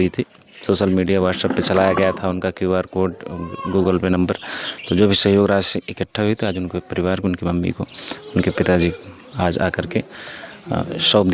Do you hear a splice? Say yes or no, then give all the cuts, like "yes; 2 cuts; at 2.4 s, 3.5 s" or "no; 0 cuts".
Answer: no; 0 cuts